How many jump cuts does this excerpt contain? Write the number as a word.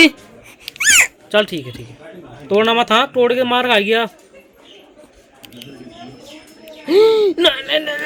zero